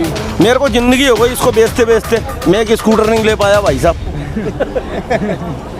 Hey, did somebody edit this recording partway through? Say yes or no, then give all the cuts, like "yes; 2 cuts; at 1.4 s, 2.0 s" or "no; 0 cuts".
no; 0 cuts